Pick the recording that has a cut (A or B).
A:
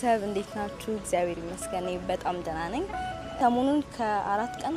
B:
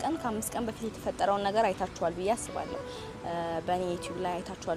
A